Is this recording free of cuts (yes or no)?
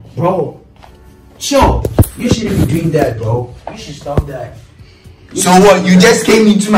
yes